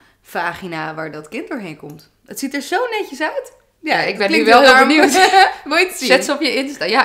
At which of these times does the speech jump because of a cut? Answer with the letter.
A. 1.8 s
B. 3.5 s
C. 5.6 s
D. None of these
D